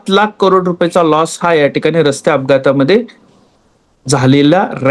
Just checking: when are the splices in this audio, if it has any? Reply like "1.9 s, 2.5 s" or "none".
none